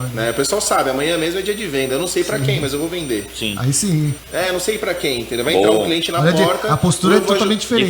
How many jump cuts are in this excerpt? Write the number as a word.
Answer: zero